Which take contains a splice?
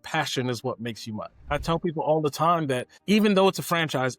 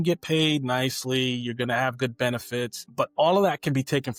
first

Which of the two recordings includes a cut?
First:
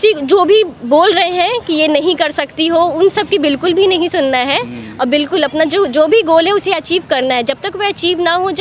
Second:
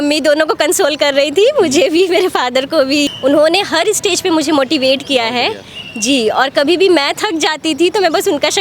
second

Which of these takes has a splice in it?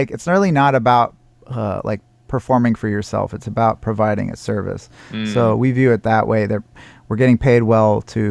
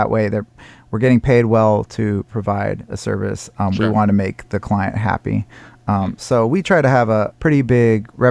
second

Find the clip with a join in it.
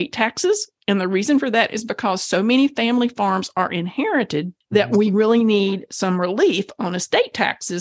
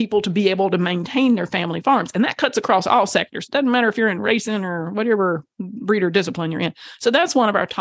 first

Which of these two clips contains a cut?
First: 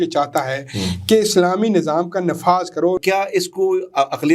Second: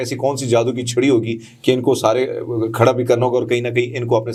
first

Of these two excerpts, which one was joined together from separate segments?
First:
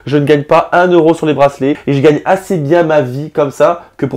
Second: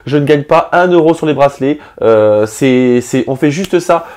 first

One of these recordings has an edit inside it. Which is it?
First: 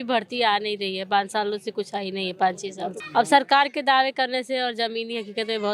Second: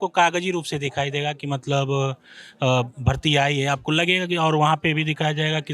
first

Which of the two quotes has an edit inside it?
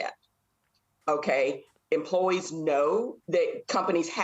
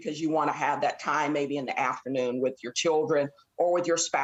first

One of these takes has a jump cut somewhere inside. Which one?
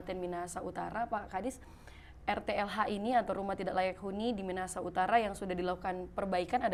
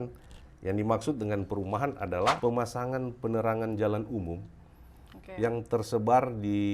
second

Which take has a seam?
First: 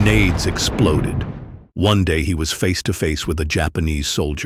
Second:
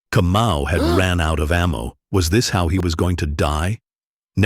second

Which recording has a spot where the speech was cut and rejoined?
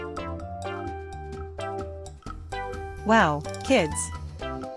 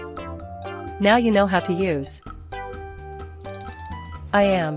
second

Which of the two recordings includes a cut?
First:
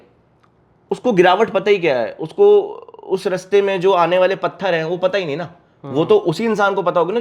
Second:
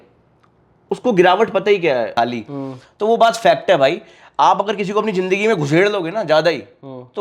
second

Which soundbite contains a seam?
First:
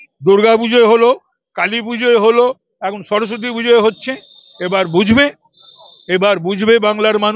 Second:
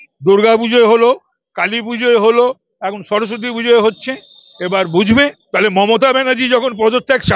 second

